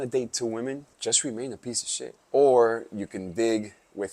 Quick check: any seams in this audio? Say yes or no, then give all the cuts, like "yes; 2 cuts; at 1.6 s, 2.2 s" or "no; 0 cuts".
yes; 2 cuts; at 0.9 s, 2.2 s